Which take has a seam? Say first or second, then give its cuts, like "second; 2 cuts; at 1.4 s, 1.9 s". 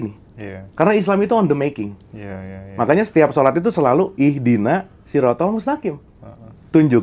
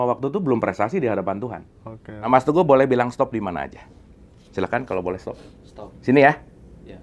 second; 1 cut; at 2.3 s